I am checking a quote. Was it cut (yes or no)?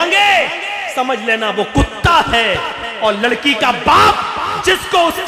no